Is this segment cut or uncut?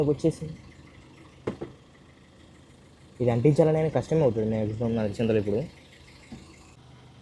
uncut